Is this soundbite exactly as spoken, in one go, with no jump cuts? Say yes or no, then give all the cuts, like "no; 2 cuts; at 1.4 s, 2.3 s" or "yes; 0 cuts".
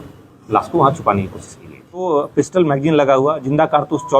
no; 1 cut; at 2.0 s